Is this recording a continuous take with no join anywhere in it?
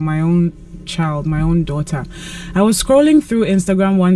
yes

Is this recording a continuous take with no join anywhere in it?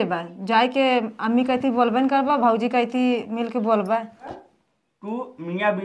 no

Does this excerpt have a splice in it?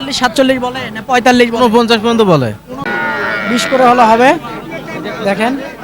yes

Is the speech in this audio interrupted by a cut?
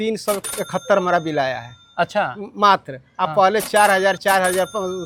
no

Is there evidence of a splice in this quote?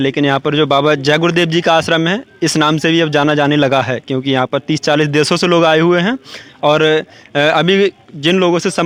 no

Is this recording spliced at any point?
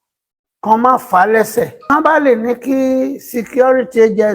yes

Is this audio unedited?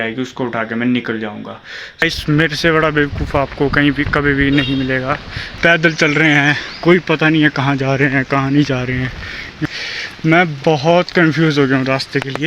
no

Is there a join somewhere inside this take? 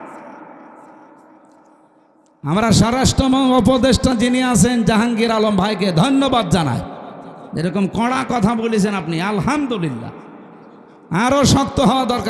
no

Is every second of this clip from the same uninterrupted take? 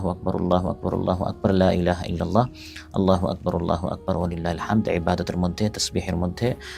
yes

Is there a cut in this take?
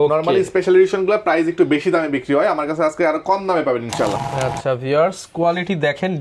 yes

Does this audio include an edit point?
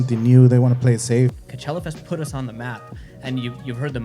yes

